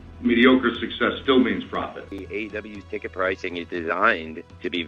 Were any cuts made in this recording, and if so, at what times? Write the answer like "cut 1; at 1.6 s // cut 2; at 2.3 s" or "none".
cut 1; at 2.0 s